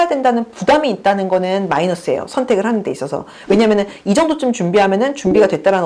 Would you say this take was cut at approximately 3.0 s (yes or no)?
no